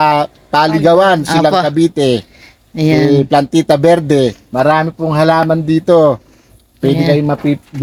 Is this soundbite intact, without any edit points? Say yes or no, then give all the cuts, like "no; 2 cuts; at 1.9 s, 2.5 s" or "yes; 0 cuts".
yes; 0 cuts